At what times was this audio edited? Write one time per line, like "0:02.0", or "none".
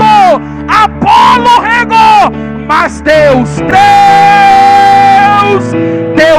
0:03.6